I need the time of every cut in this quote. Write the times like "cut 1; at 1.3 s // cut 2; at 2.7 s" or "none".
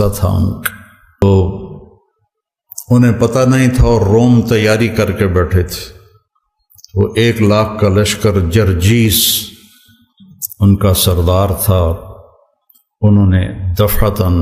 cut 1; at 1.2 s